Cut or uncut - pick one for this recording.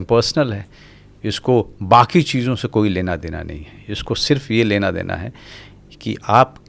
uncut